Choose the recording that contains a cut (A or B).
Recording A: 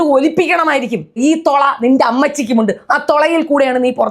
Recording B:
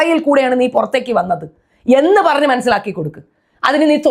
A